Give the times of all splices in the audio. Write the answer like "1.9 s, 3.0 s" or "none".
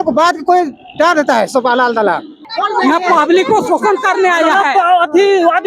2.4 s